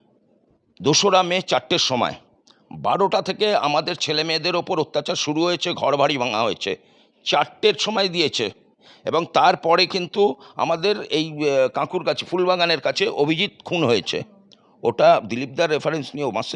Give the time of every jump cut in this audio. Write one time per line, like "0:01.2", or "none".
none